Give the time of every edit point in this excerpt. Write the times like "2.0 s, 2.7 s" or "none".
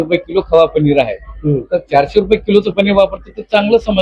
none